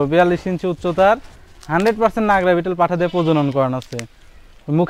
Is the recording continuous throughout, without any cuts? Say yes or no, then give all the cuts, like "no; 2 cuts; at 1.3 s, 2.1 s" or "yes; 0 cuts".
yes; 0 cuts